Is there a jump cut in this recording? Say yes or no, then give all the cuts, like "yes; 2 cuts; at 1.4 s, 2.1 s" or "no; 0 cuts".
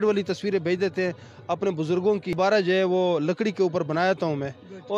no; 0 cuts